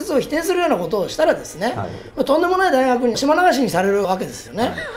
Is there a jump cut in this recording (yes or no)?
no